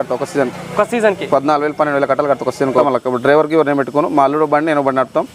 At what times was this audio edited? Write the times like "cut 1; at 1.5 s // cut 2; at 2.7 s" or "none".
cut 1; at 2.7 s

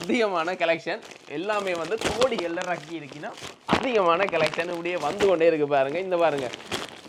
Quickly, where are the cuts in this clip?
none

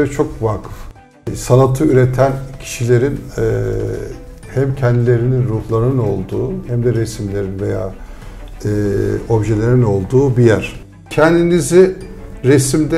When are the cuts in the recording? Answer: cut 1; at 1.1 s // cut 2; at 11.1 s

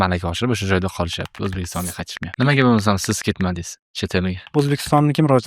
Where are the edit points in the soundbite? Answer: cut 1; at 2.3 s // cut 2; at 4.4 s

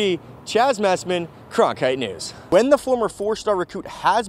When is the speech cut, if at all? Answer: cut 1; at 2.3 s

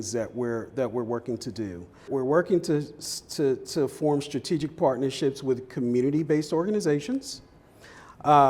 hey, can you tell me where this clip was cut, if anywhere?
cut 1; at 2.1 s

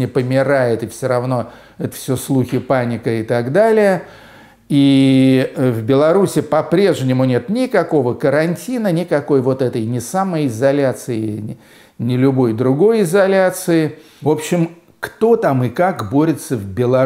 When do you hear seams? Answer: cut 1; at 14.1 s

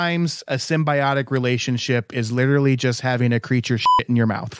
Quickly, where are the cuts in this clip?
none

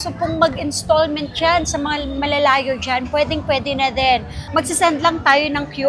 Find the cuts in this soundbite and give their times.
none

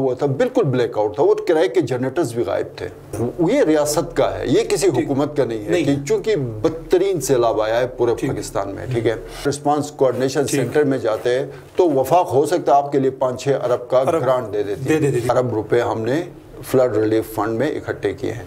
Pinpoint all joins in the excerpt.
cut 1; at 3.2 s // cut 2; at 9.4 s // cut 3; at 15.3 s

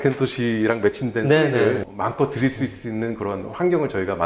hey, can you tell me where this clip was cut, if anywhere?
cut 1; at 1.9 s

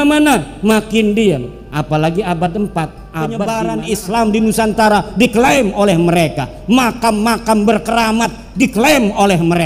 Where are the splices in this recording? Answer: cut 1; at 3.4 s

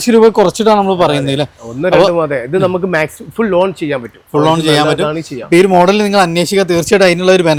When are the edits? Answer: none

